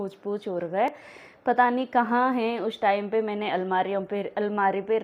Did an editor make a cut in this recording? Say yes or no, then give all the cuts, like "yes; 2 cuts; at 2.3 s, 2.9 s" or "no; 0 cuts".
no; 0 cuts